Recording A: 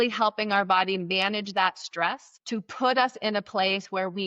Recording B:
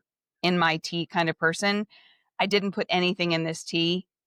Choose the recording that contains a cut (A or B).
A